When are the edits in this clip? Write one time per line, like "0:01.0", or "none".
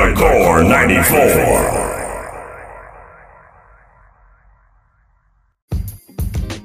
0:05.6

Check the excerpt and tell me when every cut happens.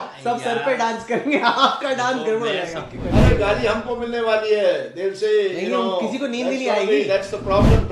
0:03.0

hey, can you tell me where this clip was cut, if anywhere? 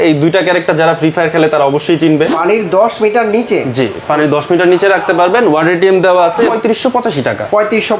0:02.4
0:06.5

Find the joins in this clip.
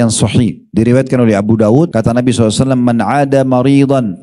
0:01.9

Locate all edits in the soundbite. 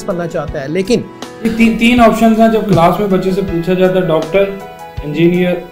none

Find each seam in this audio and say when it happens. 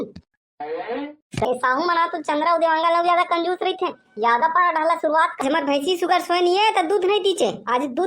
0:01.4
0:05.4

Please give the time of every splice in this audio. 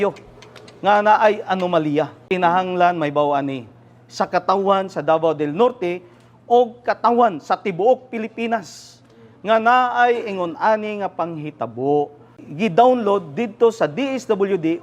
0:02.2
0:12.4

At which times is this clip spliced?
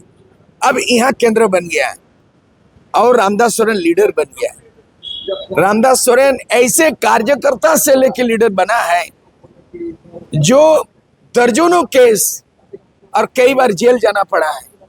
none

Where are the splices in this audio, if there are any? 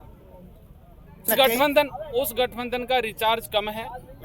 0:01.3

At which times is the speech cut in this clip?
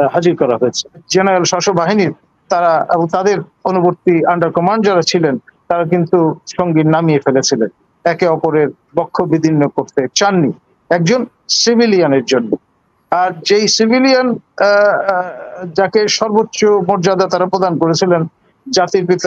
0:01.0

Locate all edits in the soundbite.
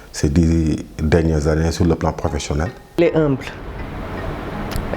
0:02.8

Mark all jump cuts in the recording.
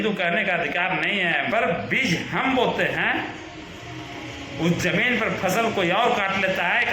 0:01.5

